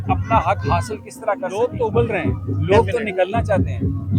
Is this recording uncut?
no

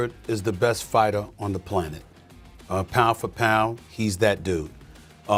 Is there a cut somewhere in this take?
no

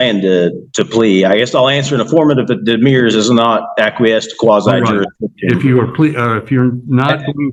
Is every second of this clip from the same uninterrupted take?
yes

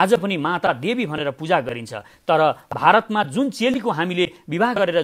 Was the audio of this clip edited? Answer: no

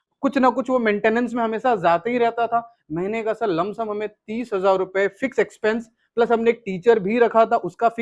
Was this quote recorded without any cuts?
yes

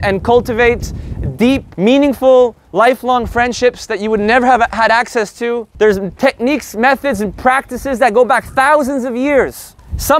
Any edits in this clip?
yes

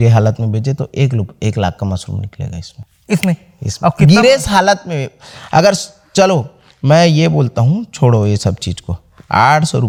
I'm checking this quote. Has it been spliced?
no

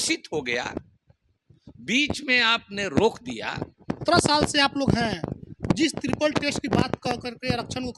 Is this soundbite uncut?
no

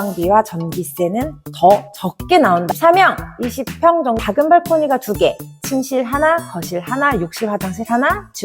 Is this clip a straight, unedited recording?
no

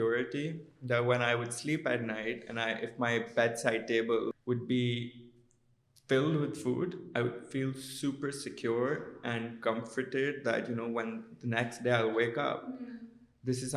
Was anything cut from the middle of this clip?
yes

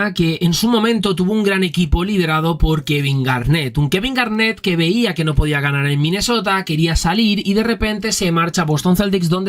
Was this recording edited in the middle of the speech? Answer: no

